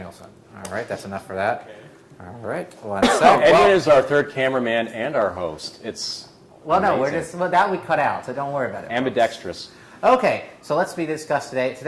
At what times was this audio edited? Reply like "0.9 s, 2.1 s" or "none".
9.4 s

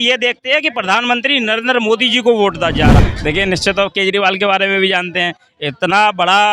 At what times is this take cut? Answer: 3.0 s

